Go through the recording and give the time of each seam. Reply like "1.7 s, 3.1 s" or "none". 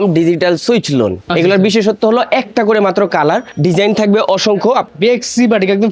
1.2 s, 3.5 s, 4.9 s